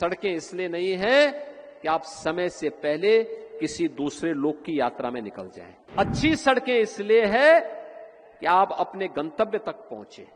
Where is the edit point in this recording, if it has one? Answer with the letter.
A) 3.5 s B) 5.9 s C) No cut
B